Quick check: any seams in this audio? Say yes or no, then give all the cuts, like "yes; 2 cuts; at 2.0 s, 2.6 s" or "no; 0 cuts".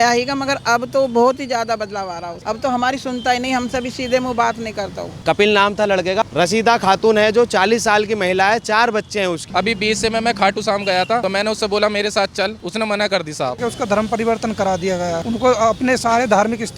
yes; 4 cuts; at 5.2 s, 6.2 s, 9.4 s, 13.6 s